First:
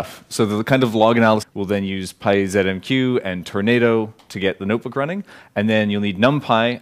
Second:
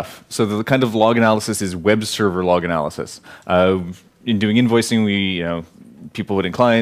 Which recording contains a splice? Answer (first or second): second